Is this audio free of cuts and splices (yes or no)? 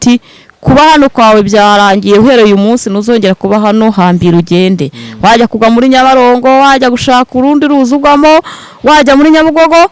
yes